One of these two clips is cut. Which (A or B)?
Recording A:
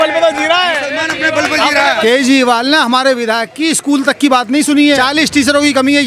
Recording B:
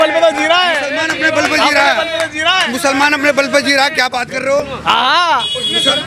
A